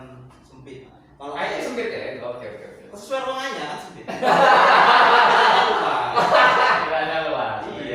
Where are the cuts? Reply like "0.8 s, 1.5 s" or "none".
1.0 s, 2.2 s